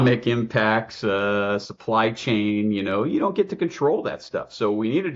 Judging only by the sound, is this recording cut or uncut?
uncut